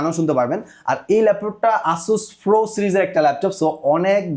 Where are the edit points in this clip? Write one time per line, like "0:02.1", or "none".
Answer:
none